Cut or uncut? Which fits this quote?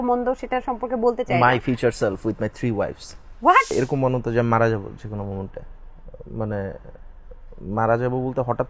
cut